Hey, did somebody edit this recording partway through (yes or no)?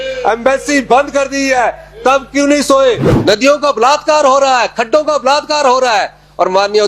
yes